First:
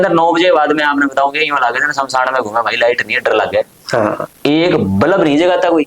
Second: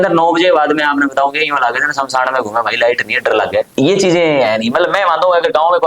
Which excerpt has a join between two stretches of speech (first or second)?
second